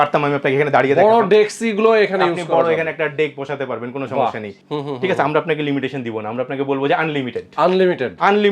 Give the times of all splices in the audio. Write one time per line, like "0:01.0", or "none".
0:04.5